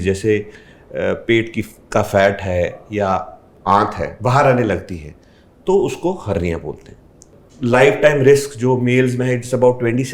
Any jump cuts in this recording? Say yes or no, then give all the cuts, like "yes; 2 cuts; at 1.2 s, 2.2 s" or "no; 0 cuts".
yes; 1 cut; at 7.3 s